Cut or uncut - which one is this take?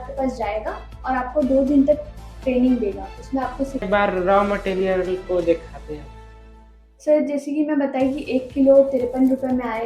cut